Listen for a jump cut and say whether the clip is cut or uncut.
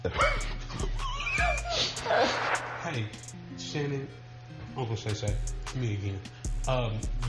cut